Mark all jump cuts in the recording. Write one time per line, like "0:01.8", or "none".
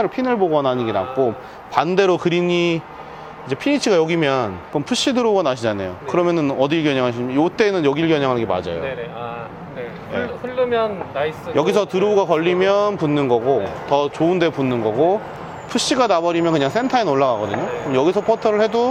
none

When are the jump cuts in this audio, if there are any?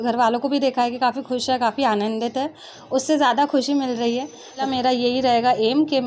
0:04.6

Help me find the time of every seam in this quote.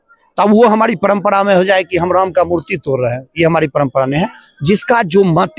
none

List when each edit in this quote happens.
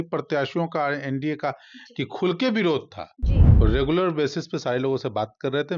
0:03.5

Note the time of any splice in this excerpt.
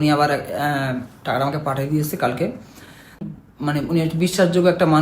0:03.3

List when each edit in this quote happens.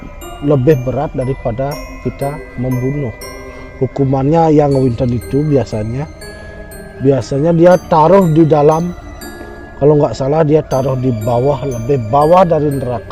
none

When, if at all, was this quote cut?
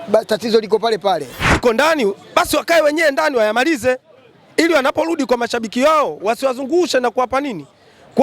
0:01.6

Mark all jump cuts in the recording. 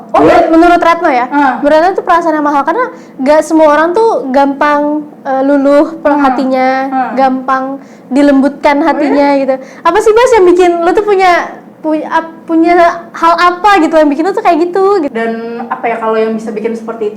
0:15.1

